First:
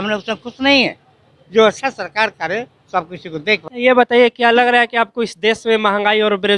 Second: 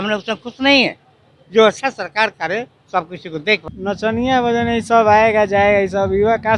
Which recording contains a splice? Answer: second; 1 cut; at 3.7 s

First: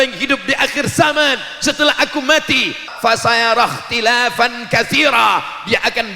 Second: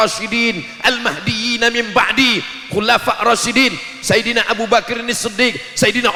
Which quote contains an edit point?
first; 1 cut; at 2.9 s

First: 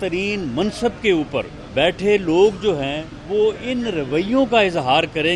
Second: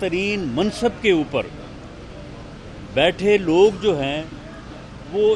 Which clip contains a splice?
first; 2 cuts; at 1.6 s, 3.1 s

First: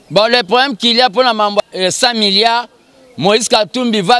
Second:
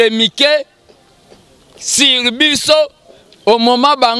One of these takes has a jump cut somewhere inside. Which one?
first; 1 cut; at 1.6 s

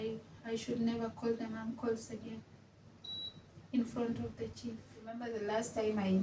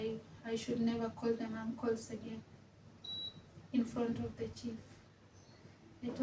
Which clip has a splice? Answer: first; 1 cut; at 5.3 s

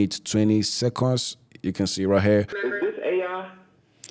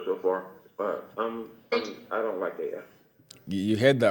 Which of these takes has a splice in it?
first; 1 cut; at 2.5 s

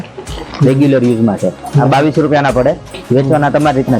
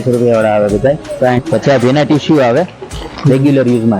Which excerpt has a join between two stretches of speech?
second; 1 cut; at 1.4 s

